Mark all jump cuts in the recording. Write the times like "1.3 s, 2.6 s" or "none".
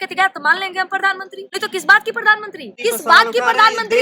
1.4 s, 2.7 s